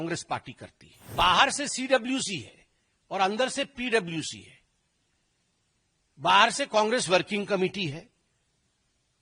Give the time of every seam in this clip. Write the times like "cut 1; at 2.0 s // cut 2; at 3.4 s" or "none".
cut 1; at 1.1 s